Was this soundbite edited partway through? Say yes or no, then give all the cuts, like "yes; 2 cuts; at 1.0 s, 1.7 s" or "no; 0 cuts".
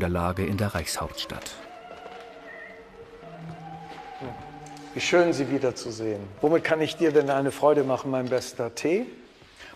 yes; 1 cut; at 2.6 s